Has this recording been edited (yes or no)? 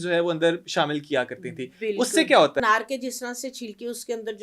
yes